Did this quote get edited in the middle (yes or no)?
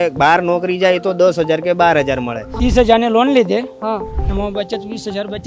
yes